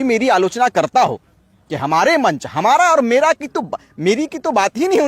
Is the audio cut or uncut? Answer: uncut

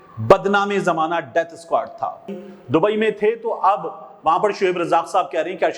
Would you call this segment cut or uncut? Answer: cut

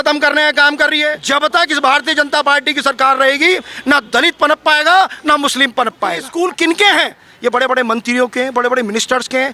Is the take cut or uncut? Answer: cut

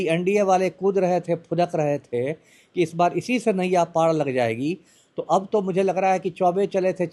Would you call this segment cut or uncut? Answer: uncut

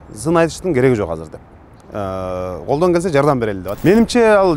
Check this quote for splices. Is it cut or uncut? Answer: cut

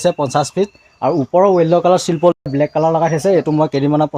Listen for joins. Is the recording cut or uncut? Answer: cut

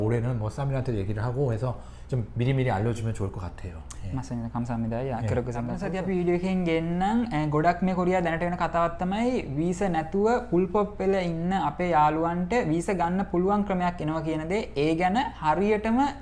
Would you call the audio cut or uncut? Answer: cut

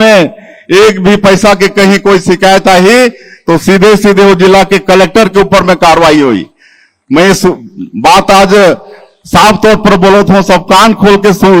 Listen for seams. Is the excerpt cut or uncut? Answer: uncut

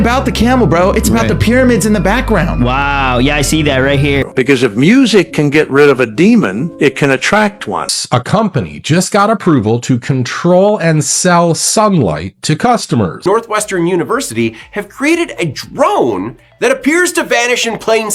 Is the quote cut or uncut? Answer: cut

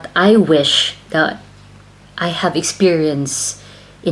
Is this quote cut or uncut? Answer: uncut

